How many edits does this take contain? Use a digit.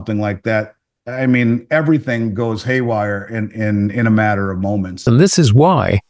1